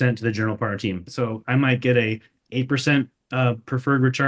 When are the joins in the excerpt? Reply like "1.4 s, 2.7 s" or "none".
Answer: 1.1 s